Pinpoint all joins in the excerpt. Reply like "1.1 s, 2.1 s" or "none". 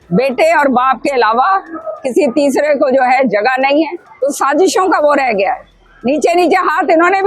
4.0 s